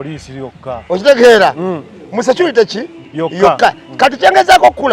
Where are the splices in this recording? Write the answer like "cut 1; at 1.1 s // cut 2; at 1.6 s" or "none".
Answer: none